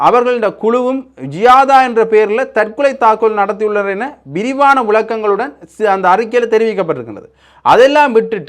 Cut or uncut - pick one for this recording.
uncut